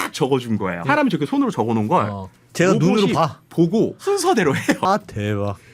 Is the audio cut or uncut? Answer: cut